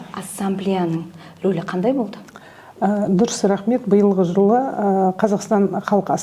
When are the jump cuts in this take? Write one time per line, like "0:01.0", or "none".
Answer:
none

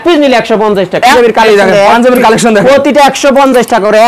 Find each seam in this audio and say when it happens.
0:01.1

